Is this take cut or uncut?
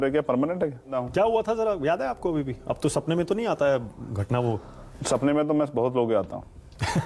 cut